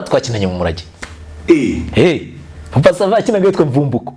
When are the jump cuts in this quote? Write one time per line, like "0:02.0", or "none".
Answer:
none